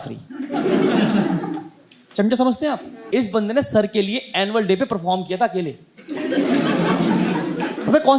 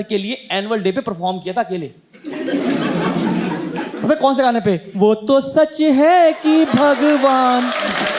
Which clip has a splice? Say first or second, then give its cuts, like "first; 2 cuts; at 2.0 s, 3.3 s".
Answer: first; 1 cut; at 2.9 s